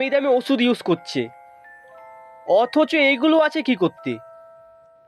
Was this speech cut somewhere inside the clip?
no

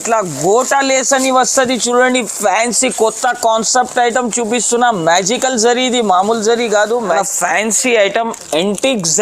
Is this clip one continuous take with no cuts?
no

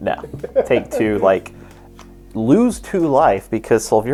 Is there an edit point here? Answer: no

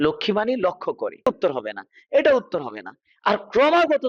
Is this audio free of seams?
no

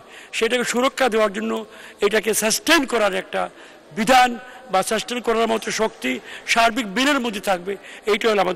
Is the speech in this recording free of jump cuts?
yes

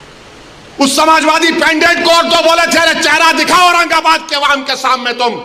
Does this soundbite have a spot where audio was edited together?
no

